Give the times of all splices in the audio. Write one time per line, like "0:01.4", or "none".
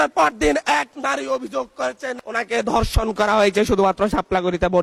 none